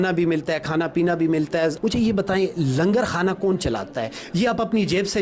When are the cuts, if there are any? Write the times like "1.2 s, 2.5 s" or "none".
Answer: 1.8 s